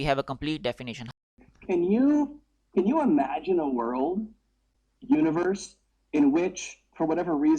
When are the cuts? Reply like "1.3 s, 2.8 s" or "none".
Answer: 1.1 s